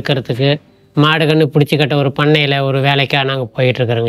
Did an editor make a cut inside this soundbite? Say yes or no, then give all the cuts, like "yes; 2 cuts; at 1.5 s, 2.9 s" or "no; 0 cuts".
no; 0 cuts